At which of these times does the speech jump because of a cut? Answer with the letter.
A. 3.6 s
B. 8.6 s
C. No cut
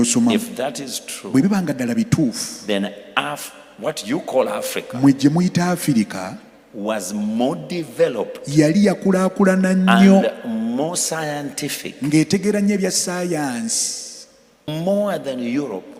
C